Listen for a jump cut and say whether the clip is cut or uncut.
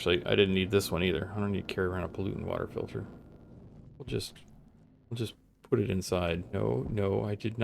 cut